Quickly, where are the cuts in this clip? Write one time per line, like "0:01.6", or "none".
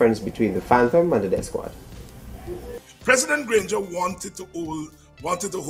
0:02.8